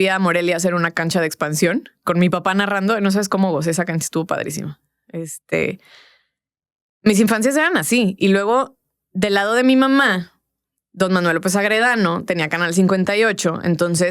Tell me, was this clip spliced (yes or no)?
no